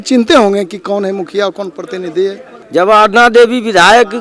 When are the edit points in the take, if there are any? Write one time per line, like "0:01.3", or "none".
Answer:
0:02.5